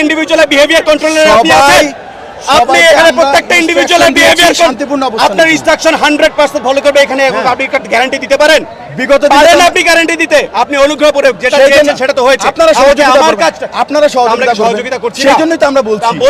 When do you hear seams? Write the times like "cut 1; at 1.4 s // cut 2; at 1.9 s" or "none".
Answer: none